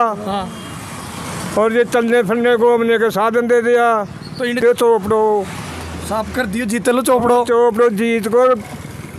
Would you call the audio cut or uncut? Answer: cut